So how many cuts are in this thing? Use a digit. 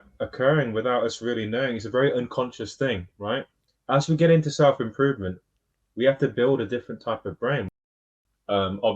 1